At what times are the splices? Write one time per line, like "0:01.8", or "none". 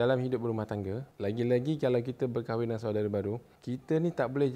0:01.0
0:03.5